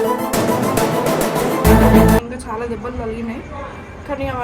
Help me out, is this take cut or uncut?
cut